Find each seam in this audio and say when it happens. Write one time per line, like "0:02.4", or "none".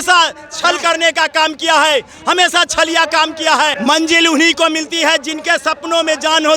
0:03.8